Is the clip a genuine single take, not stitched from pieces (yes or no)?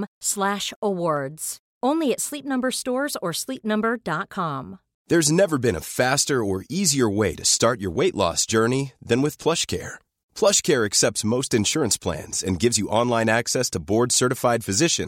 no